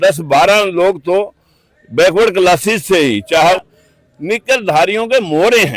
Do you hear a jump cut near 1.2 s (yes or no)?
no